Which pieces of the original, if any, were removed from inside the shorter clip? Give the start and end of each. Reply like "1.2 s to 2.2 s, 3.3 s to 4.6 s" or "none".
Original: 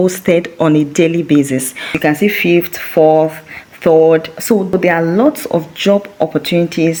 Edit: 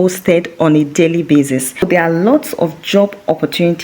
1.8 s to 4.7 s